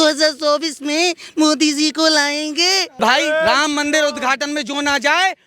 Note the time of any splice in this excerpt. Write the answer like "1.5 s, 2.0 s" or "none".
3.0 s